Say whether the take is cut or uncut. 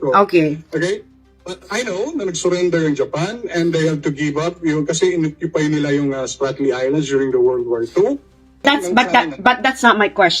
cut